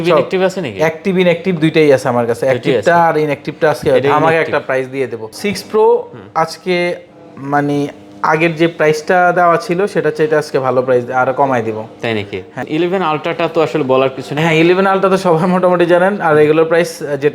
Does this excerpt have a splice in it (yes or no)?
yes